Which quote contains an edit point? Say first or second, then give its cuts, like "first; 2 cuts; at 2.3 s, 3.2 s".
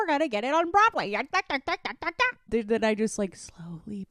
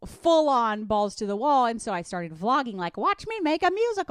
first; 1 cut; at 2.5 s